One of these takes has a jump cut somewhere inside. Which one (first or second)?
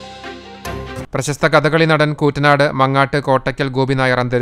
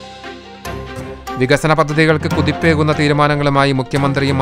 second